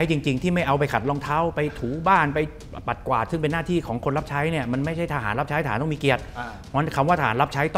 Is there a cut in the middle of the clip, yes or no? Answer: no